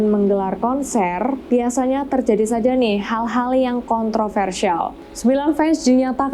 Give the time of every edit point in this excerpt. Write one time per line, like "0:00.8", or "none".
0:05.0